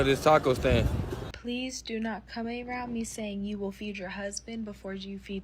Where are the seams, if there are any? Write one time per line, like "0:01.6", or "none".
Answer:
0:01.3